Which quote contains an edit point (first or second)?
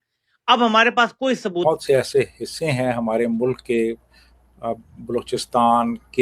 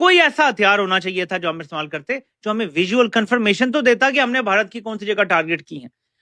first